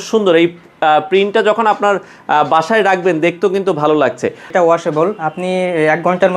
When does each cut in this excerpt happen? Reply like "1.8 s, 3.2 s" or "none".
4.5 s